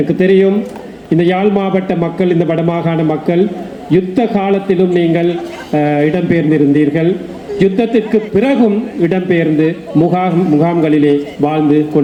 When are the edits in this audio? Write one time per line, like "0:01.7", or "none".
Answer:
none